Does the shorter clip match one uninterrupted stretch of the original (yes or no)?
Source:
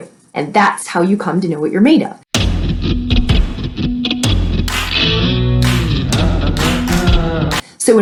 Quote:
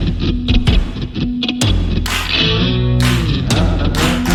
yes